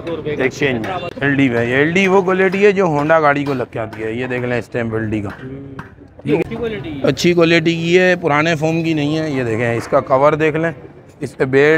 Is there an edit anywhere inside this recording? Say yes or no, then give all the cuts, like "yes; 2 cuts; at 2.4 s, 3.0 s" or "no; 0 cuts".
yes; 2 cuts; at 1.1 s, 6.4 s